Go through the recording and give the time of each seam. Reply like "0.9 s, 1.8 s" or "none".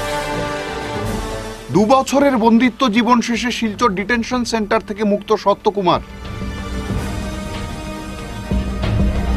1.0 s